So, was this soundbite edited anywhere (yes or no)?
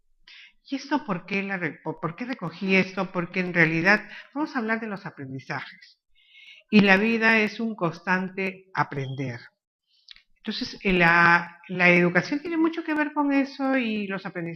no